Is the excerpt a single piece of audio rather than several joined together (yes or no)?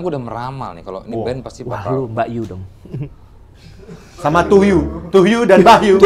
yes